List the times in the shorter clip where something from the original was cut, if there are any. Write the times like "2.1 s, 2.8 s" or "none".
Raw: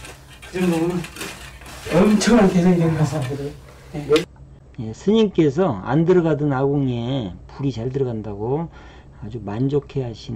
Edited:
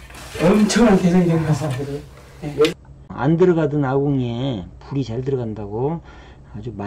3.1 s